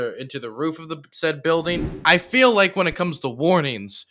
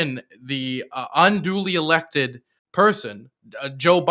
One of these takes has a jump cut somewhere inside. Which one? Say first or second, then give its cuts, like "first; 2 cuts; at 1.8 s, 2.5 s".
first; 1 cut; at 1.9 s